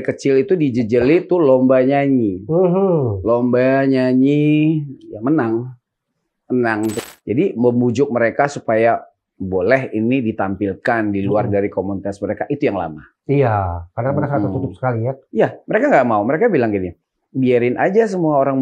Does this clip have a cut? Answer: yes; 1 cut; at 7.1 s

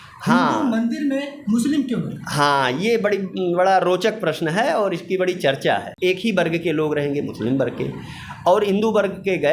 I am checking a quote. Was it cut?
yes; 1 cut; at 5.9 s

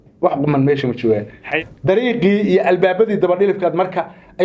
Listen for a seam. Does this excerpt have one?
yes; 1 cut; at 1.6 s

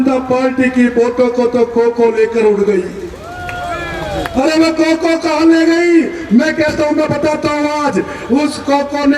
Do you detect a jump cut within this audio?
no; 0 cuts

